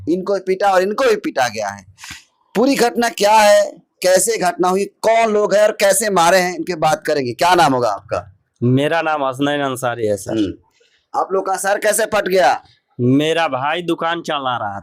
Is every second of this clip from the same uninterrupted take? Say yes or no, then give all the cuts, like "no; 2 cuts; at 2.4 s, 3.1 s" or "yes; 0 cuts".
yes; 0 cuts